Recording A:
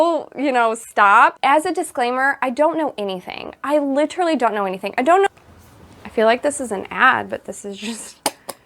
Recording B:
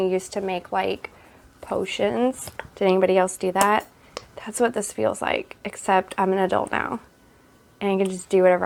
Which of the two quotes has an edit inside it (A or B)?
A